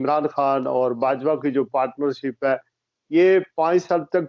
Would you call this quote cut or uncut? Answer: uncut